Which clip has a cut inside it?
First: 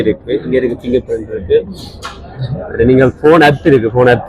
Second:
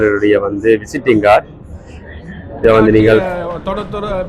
second; 1 cut; at 3.3 s

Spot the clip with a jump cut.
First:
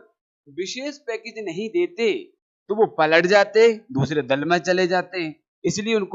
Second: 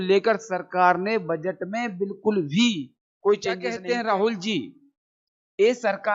second; 1 cut; at 3.7 s

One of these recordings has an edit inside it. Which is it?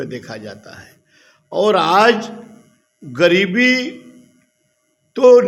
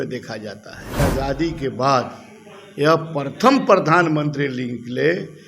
second; 1 cut; at 1.0 s

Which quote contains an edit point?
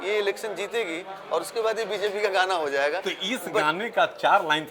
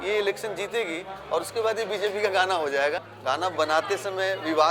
second; 1 cut; at 3.0 s

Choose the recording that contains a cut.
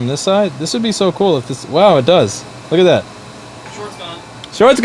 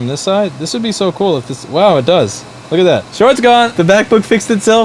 second; 2 cuts; at 3.1 s, 3.7 s

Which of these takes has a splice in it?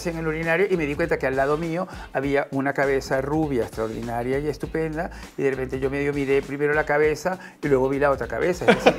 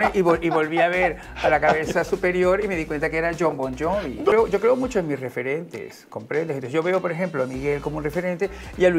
second; 1 cut; at 4.3 s

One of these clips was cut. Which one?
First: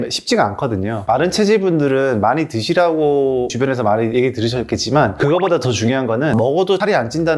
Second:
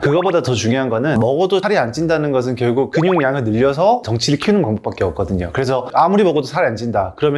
first; 1 cut; at 1.0 s

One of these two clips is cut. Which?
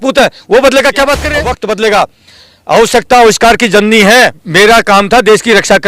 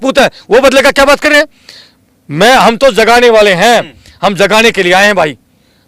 first; 2 cuts; at 1.3 s, 4.4 s

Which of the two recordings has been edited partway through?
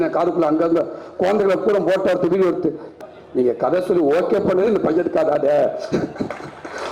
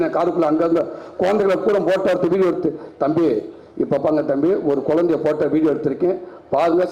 first; 1 cut; at 2.9 s

